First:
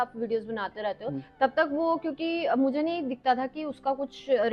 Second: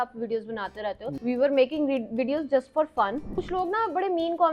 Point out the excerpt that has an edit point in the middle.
second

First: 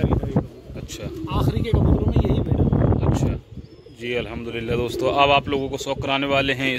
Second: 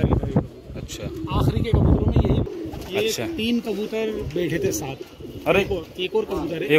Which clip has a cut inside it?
second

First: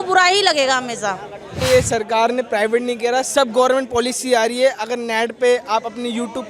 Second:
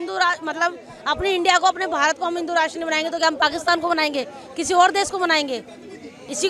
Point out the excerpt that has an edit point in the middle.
first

